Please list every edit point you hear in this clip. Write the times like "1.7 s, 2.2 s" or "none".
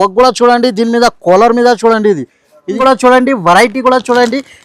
2.8 s